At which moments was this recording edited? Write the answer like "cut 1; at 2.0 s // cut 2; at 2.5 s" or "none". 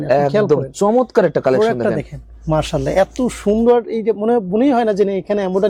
none